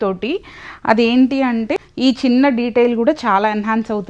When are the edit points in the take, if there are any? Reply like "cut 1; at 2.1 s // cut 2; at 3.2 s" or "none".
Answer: cut 1; at 1.7 s